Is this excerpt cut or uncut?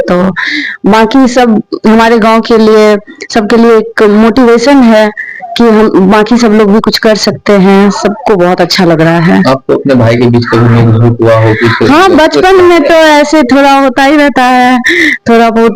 uncut